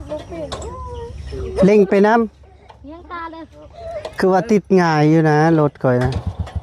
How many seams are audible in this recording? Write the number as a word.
one